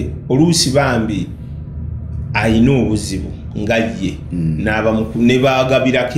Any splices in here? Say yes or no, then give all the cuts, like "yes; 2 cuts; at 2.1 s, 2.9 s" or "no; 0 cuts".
no; 0 cuts